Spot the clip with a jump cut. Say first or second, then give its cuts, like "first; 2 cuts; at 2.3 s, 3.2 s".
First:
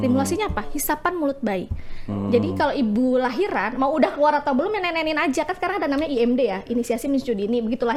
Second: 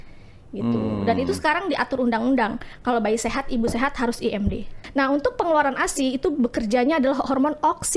second; 1 cut; at 4.8 s